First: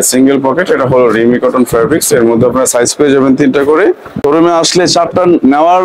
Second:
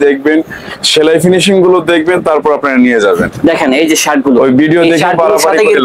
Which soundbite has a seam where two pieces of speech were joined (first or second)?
first